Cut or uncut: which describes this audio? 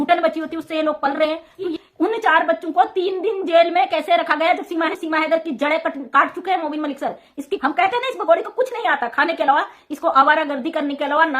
cut